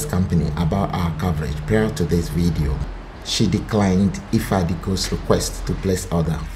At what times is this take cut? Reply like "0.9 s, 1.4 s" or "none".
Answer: none